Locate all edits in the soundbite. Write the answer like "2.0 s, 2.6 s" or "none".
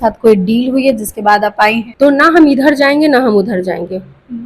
1.9 s